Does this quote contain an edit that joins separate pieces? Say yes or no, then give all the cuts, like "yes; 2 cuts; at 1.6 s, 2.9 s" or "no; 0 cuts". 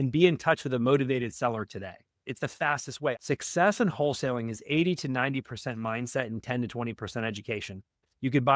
yes; 1 cut; at 3.2 s